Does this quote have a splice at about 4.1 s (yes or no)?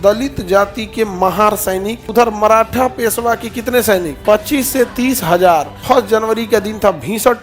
yes